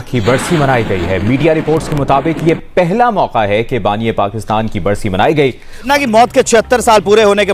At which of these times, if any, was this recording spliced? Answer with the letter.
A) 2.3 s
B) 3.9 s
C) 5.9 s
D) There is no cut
C